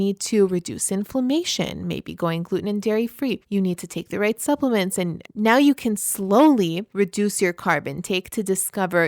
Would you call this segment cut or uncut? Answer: cut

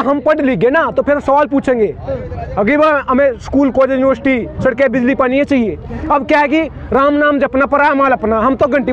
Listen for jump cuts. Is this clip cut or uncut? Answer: uncut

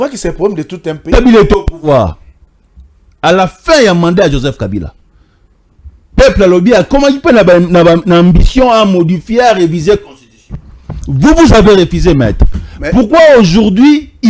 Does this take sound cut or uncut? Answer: cut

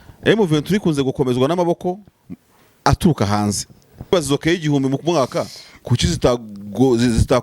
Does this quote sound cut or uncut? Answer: cut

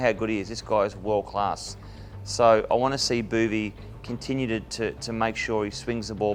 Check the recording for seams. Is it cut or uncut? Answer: uncut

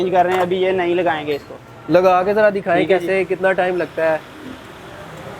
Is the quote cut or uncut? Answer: uncut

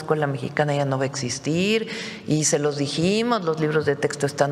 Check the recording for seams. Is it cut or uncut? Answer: uncut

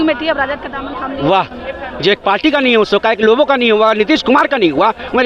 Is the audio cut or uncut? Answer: uncut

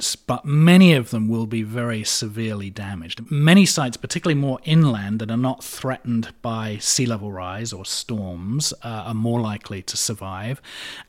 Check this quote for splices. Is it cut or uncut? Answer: cut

